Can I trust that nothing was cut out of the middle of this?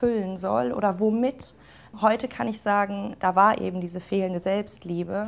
yes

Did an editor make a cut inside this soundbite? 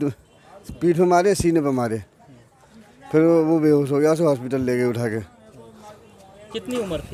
no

